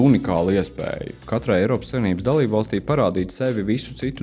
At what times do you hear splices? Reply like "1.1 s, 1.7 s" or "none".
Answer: 1.1 s